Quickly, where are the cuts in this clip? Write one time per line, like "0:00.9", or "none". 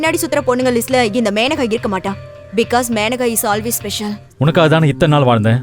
0:04.2